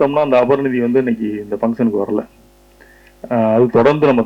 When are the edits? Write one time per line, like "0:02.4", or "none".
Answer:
none